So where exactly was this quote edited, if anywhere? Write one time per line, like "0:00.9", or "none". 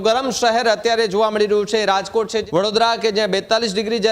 0:02.4